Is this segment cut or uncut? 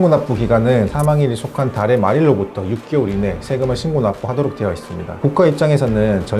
cut